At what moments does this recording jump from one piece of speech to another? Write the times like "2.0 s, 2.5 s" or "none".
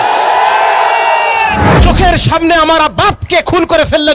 1.7 s